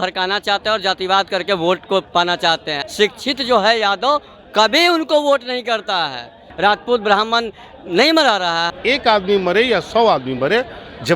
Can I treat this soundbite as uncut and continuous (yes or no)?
no